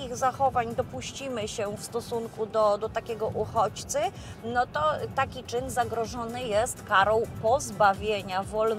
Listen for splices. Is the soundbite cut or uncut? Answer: uncut